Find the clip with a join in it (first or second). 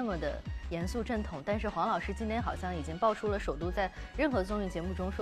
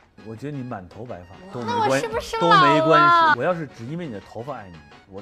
second